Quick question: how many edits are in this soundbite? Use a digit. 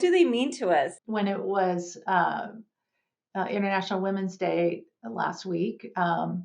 1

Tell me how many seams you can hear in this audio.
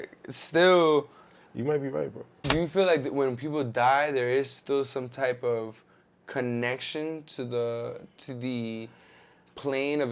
1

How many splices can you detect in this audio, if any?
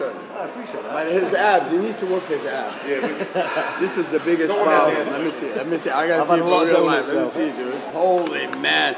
1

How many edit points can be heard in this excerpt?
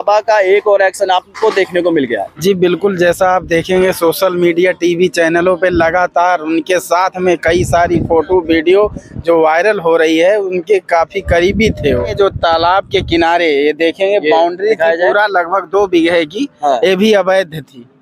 2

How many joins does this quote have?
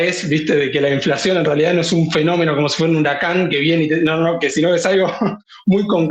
0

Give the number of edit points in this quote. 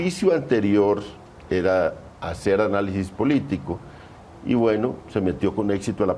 0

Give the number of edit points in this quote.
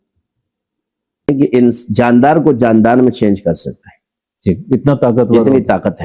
1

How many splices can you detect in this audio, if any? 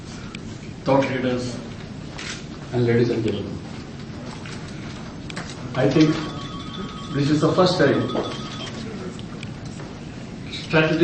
1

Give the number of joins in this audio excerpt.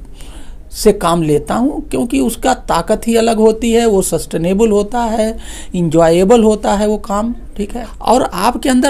1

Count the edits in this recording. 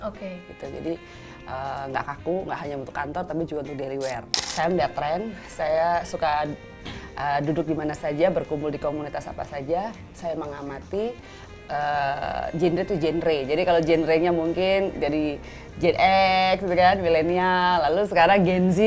1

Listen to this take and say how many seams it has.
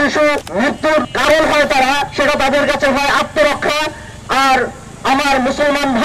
2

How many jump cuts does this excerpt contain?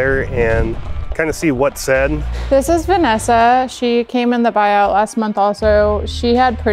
1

